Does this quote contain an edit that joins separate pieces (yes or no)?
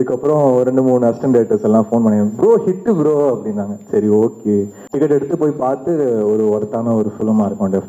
yes